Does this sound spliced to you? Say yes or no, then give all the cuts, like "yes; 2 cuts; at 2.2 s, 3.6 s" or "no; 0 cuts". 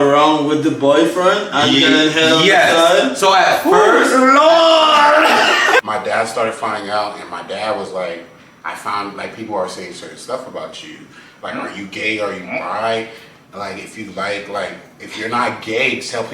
yes; 1 cut; at 5.8 s